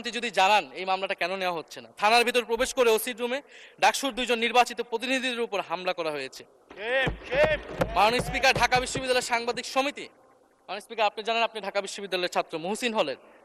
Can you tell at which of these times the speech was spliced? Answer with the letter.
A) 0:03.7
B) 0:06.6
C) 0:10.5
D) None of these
D